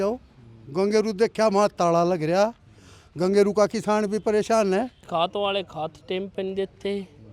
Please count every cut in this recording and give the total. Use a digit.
1